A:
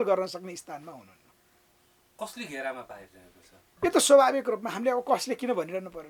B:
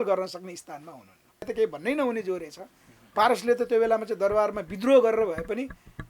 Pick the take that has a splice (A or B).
B